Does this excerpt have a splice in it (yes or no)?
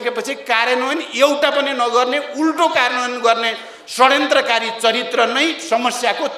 no